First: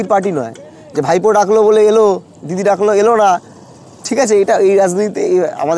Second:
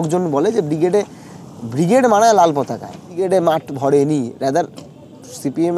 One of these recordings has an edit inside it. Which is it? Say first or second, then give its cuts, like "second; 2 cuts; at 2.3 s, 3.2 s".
second; 1 cut; at 3.2 s